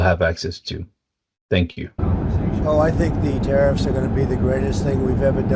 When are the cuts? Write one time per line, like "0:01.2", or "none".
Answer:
0:02.0